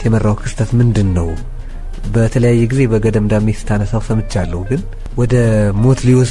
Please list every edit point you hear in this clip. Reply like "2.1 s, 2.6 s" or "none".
5.0 s